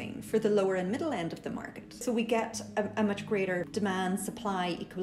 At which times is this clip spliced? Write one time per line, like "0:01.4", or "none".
0:02.0
0:03.7